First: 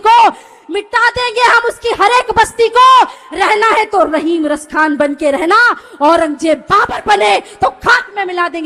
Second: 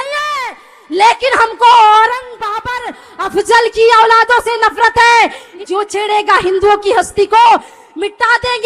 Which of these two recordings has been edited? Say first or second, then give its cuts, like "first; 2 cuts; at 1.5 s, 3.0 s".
second; 1 cut; at 5.5 s